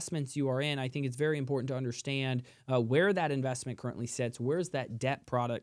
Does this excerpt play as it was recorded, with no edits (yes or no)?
yes